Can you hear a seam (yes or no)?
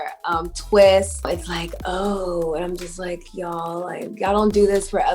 yes